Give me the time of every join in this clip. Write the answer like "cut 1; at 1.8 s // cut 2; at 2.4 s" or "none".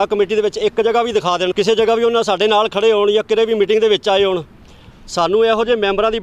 cut 1; at 1.5 s